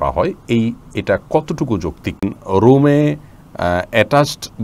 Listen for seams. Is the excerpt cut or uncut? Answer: cut